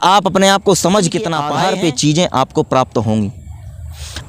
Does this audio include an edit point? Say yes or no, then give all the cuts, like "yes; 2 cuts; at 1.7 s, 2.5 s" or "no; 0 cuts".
yes; 1 cut; at 1.4 s